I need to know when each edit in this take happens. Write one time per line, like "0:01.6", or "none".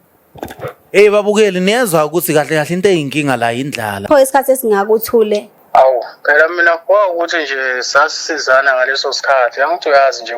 0:03.9
0:05.5